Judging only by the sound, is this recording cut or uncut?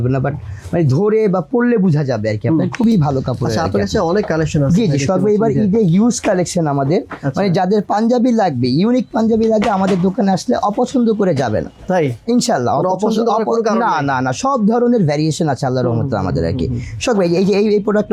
uncut